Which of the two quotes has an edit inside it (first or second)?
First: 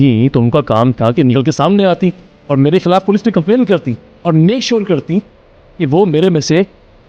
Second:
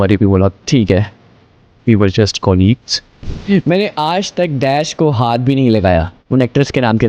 second